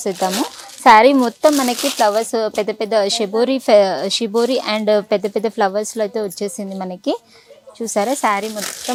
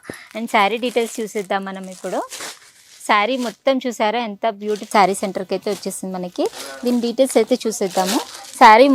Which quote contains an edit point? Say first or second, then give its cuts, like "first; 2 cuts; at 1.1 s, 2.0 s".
second; 1 cut; at 4.9 s